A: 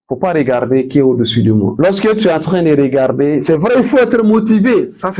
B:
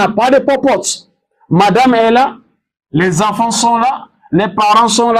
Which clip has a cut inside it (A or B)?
A